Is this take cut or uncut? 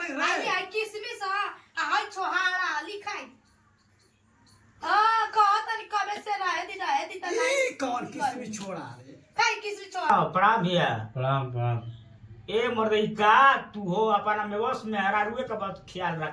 cut